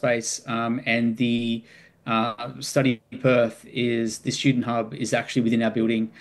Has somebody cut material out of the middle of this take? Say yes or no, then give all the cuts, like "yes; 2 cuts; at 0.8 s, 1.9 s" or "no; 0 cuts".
no; 0 cuts